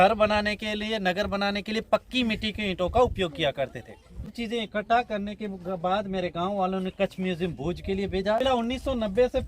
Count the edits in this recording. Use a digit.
2